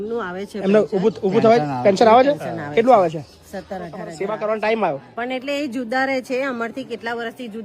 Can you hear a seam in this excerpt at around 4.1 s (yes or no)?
yes